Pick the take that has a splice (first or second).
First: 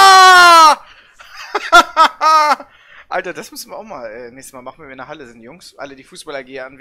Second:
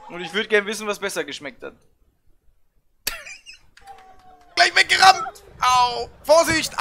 second